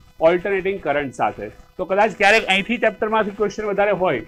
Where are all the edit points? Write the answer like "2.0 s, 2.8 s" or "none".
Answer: none